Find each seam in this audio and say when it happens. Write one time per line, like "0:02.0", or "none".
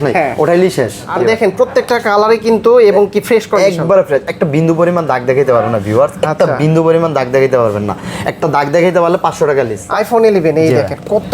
0:01.1
0:09.8